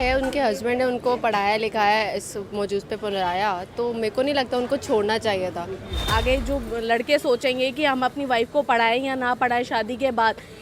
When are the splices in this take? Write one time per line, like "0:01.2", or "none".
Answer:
0:06.0